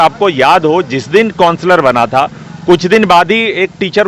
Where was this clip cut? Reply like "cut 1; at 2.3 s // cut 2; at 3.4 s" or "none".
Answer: none